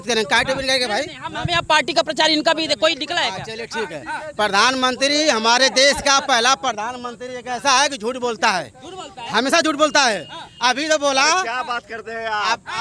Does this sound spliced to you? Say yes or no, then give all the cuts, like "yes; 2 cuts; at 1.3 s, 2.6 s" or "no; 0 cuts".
no; 0 cuts